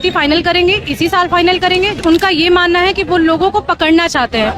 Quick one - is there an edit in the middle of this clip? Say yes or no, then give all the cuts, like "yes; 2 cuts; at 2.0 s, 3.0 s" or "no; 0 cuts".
yes; 1 cut; at 2.0 s